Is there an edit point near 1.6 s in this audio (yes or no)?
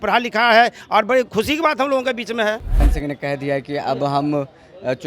no